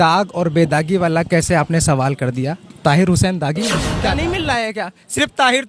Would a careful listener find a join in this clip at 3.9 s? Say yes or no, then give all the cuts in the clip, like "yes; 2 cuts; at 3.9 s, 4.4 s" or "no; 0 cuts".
yes; 1 cut; at 3.9 s